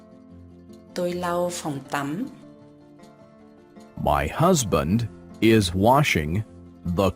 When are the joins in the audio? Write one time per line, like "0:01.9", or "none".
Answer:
0:02.4
0:03.9